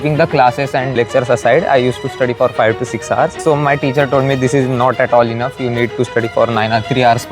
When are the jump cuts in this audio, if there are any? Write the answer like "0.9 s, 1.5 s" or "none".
1.0 s, 3.4 s